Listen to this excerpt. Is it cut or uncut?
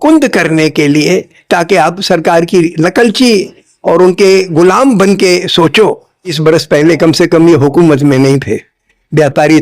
cut